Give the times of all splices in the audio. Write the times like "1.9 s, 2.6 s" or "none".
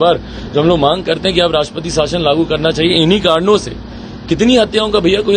none